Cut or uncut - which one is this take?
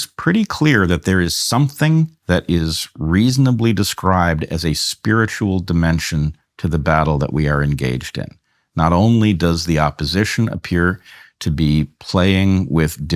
uncut